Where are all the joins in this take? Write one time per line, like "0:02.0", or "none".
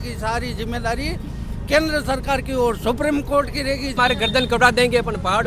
0:03.9